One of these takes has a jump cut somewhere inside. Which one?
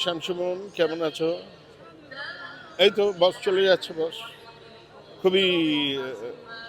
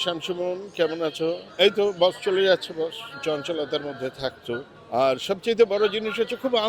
second; 3 cuts; at 1.5 s, 3.1 s, 4.7 s

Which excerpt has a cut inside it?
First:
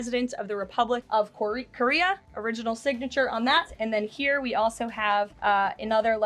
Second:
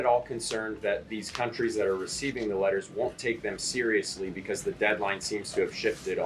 first; 4 cuts; at 1.0 s, 2.3 s, 3.7 s, 5.3 s

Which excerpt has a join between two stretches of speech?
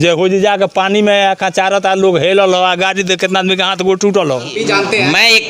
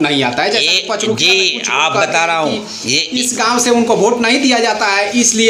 first; 1 cut; at 4.5 s

